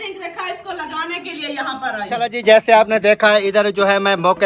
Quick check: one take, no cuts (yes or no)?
no